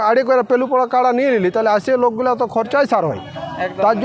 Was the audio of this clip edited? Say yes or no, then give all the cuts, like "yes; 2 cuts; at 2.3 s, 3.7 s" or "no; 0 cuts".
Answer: no; 0 cuts